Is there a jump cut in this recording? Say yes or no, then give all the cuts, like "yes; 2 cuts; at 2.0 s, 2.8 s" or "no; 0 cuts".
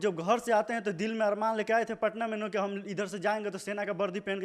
no; 0 cuts